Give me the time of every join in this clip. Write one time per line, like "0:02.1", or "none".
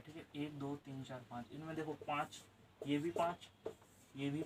none